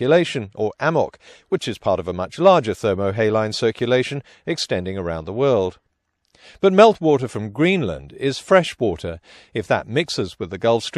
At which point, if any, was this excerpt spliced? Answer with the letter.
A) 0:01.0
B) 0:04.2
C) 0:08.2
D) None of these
A